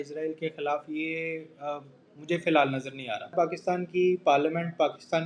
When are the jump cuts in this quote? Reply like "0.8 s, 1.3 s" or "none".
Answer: 3.3 s

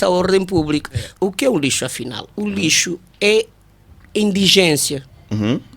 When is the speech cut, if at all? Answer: 1.0 s

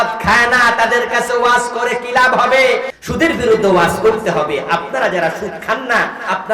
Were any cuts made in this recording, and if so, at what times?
3.0 s

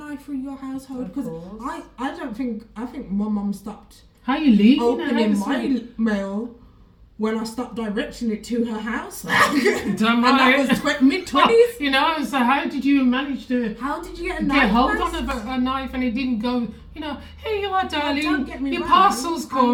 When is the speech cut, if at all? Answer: none

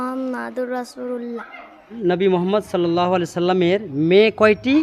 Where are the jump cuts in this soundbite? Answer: 2.0 s

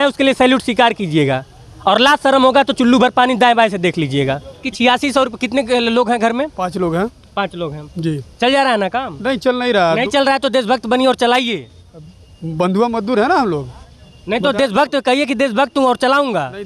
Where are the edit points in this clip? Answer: 4.6 s

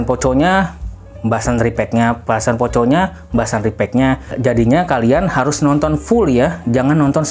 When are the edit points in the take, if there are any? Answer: 4.3 s

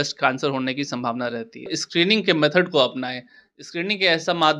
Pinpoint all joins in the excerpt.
1.8 s

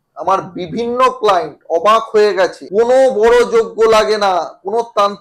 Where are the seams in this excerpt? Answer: 2.6 s

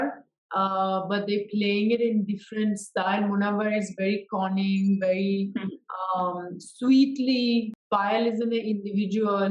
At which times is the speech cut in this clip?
7.8 s

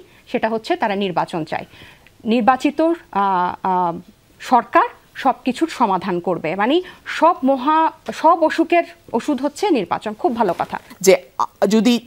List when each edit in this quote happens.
10.8 s

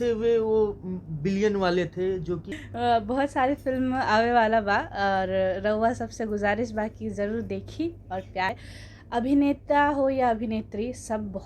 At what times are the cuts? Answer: 2.6 s, 8.5 s

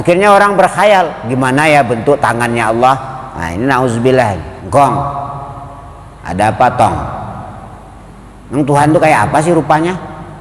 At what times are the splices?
4.5 s

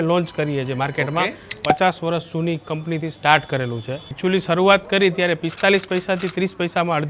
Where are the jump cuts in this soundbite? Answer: 1.5 s, 4.0 s

